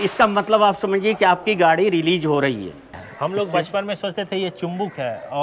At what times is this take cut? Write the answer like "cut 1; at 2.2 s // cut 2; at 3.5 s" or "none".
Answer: cut 1; at 2.9 s